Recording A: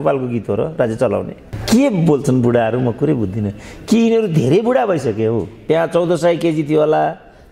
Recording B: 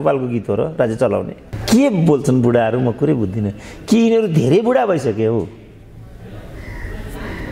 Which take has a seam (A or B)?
A